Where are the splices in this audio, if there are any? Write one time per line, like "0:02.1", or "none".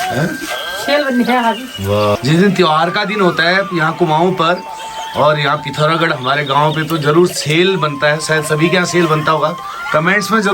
none